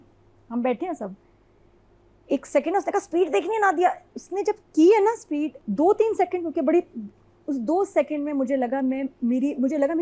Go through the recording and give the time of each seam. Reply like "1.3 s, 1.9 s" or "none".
5.6 s